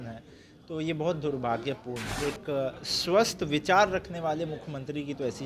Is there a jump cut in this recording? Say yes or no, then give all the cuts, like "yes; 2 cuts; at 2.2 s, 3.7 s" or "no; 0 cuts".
yes; 1 cut; at 2.1 s